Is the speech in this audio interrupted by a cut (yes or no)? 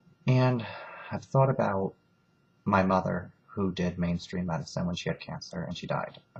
no